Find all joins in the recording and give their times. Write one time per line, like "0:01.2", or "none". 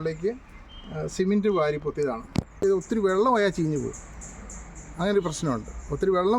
0:02.6